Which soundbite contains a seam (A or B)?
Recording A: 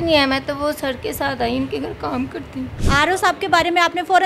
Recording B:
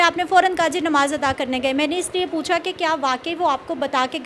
A